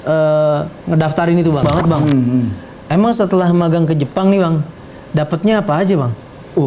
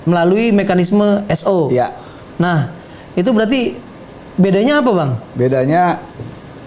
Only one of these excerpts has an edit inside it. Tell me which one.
first; 1 cut; at 1.8 s

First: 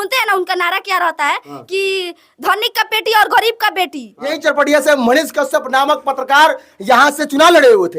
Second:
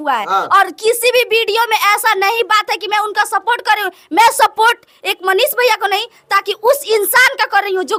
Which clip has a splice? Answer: first; 1 cut; at 4.4 s

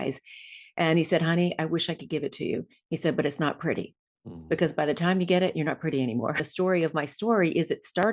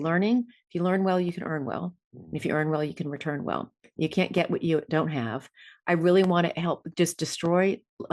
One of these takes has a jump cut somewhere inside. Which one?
first; 1 cut; at 6.5 s

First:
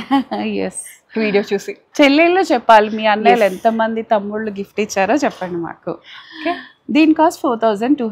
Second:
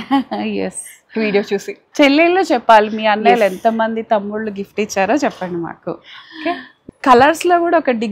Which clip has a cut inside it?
second; 1 cut; at 6.7 s

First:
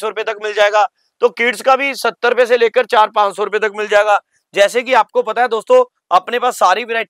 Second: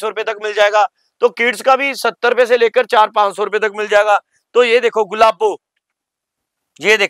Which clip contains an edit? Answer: first; 1 cut; at 4.4 s

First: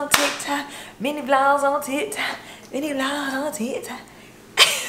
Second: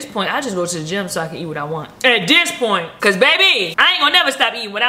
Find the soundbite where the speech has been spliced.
second; 3 cuts; at 1.9 s, 2.9 s, 3.7 s

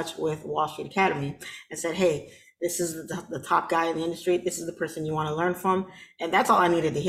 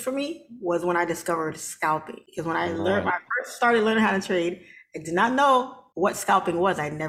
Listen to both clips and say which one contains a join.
second; 2 cuts; at 2.2 s, 5.8 s

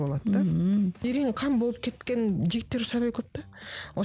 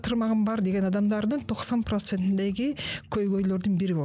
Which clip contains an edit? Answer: first; 1 cut; at 1.0 s

